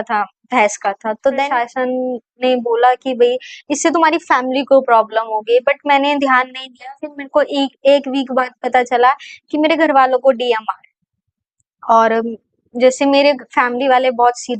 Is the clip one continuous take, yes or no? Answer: no